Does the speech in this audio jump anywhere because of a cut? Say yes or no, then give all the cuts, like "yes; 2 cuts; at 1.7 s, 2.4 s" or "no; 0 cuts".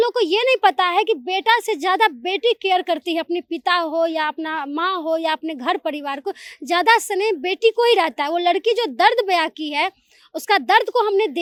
no; 0 cuts